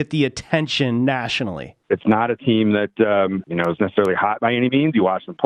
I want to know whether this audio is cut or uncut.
cut